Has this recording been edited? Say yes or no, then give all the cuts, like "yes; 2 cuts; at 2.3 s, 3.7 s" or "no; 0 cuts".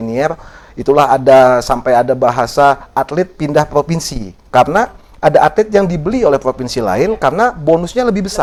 no; 0 cuts